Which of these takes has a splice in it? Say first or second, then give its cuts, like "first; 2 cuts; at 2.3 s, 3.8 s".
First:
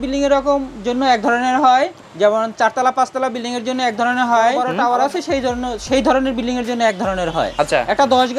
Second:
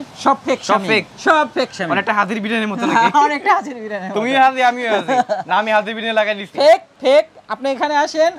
first; 3 cuts; at 2.0 s, 4.7 s, 7.5 s